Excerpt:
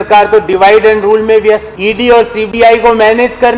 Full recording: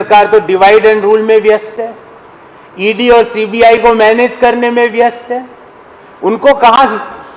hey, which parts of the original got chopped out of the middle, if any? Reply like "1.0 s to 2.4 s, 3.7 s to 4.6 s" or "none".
1.7 s to 2.7 s